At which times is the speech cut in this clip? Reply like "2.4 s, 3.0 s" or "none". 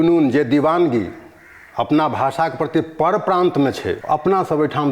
3.9 s